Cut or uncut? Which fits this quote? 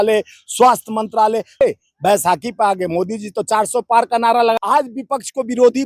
cut